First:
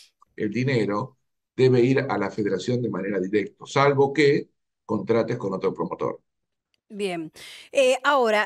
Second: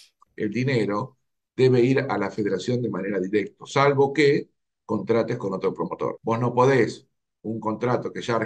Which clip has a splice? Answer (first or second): second